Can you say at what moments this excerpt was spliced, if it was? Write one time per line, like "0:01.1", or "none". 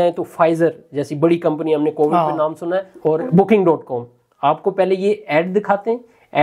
0:02.9